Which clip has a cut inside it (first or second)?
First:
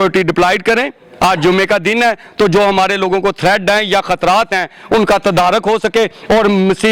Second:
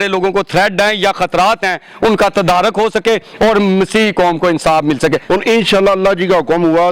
second